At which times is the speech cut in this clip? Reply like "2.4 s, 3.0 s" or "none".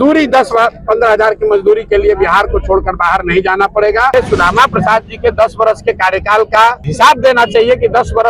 4.1 s, 6.8 s